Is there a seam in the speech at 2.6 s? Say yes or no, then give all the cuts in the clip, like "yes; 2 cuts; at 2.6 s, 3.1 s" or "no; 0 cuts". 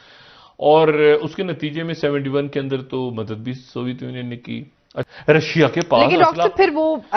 no; 1 cut; at 5.0 s